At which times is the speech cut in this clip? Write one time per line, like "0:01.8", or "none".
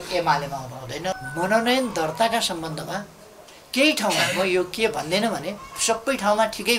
0:01.1